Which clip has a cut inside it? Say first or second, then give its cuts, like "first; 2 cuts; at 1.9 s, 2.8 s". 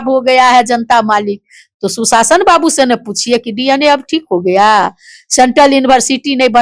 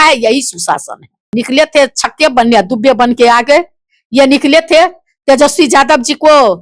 second; 1 cut; at 1.3 s